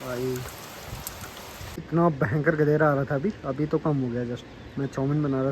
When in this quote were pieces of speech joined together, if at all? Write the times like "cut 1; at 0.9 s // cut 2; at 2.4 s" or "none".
cut 1; at 1.8 s